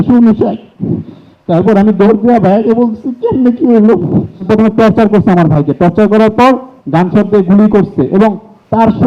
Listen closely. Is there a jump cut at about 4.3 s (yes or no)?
yes